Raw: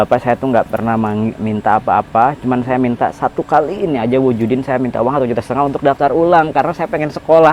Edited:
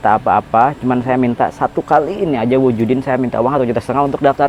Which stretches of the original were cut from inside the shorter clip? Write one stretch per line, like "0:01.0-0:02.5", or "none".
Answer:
none